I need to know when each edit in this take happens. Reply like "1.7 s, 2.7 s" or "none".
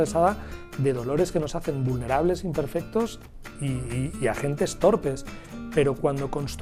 none